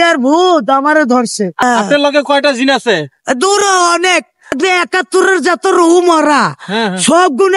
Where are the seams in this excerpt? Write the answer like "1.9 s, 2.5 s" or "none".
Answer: 1.6 s, 4.5 s